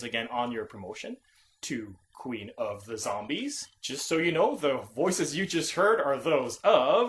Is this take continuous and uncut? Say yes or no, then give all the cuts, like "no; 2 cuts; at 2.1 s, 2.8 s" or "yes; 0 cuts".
yes; 0 cuts